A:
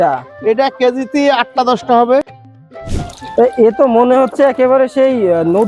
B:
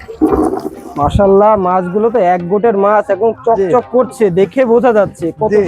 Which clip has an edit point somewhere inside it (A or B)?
A